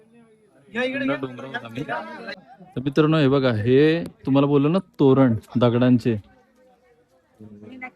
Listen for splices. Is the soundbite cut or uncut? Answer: cut